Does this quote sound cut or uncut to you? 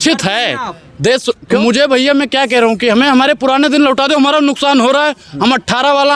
cut